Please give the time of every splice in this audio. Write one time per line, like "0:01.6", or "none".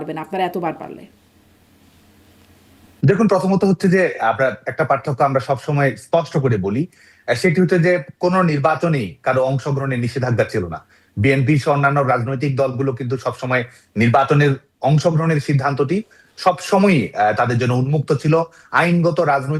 none